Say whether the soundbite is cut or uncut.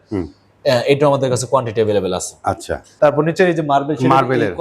cut